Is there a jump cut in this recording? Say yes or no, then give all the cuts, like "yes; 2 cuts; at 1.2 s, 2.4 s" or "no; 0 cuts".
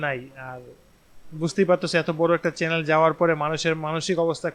no; 0 cuts